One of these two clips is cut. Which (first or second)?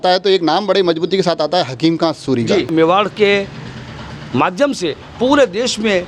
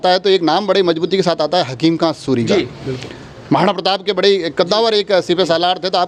first